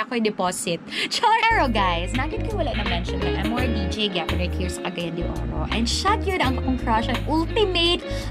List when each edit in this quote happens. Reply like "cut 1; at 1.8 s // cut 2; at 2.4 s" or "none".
cut 1; at 1.4 s